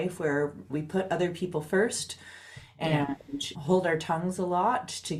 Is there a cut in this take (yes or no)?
no